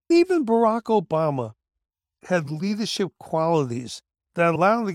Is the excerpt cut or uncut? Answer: uncut